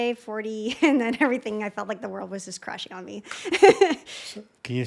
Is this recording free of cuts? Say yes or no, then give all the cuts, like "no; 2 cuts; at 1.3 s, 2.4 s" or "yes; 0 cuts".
yes; 0 cuts